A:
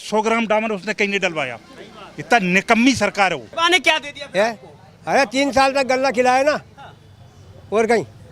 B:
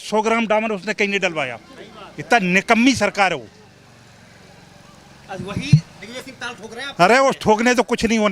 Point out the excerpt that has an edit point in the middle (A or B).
A